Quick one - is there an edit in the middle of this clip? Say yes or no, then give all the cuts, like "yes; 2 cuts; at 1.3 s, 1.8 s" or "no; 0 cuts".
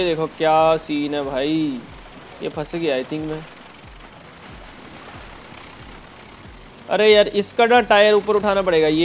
no; 0 cuts